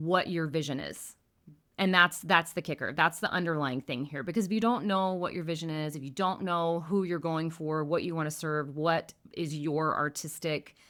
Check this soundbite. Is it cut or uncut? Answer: uncut